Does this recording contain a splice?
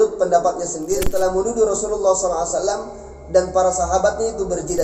yes; 1 cut; at 1.0 s

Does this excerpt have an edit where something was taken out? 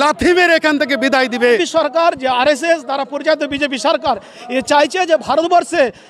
yes; 1 cut; at 1.6 s

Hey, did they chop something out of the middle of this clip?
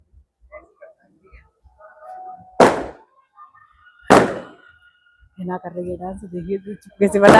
no; 0 cuts

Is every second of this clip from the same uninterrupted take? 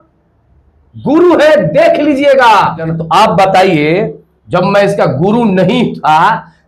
no; 1 cut; at 2.9 s

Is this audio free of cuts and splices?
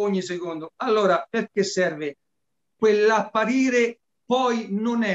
no; 1 cut; at 4.1 s

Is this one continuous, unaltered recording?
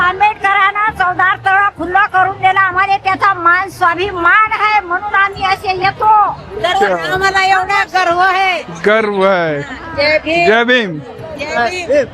yes; 0 cuts

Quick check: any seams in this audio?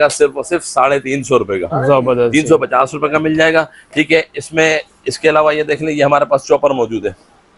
no; 0 cuts

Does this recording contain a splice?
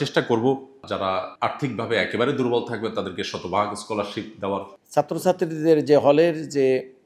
yes; 2 cuts; at 1.0 s, 4.8 s

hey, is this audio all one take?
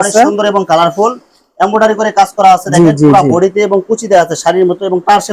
yes; 0 cuts

